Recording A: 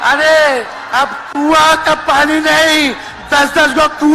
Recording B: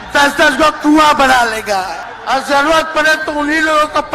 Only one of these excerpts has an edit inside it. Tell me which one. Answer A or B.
B